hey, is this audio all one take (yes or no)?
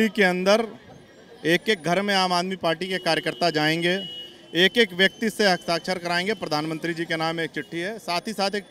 yes